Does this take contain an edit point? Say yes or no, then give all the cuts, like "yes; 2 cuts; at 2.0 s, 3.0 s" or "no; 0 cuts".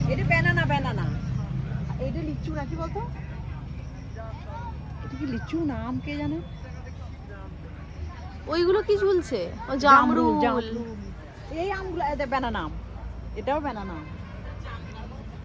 no; 0 cuts